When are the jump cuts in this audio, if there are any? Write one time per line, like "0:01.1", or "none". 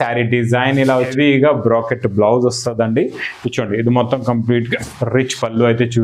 0:01.0